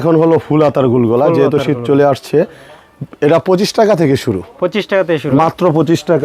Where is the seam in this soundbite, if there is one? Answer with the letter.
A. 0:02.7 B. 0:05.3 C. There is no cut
C